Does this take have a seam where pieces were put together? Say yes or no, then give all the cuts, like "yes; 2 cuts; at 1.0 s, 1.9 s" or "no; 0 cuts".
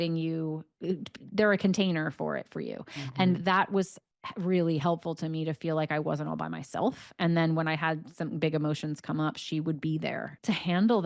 no; 0 cuts